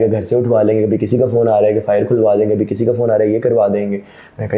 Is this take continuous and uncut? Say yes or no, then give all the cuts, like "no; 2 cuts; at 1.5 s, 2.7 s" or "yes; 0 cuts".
yes; 0 cuts